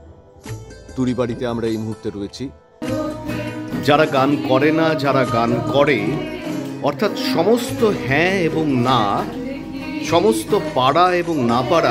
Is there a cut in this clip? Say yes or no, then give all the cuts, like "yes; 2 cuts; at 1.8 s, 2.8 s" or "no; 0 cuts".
yes; 1 cut; at 2.8 s